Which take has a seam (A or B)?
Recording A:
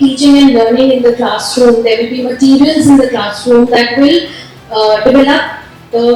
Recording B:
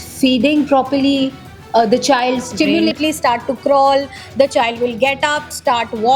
B